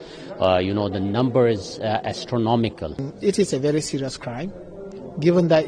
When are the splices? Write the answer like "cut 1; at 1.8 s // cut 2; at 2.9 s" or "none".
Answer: cut 1; at 3.1 s